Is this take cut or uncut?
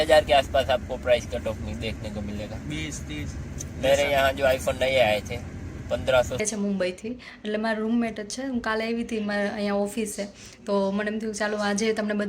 cut